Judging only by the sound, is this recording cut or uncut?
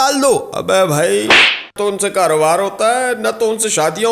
cut